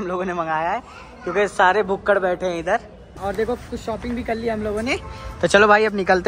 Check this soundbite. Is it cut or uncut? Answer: cut